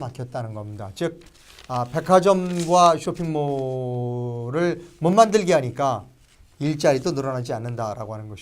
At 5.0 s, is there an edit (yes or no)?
no